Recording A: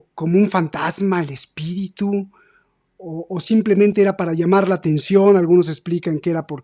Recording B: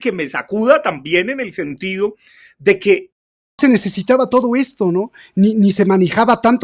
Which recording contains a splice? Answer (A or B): B